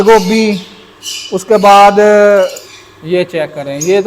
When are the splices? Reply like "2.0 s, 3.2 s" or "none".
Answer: 2.6 s